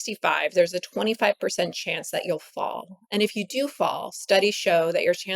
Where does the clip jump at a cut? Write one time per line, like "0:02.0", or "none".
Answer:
none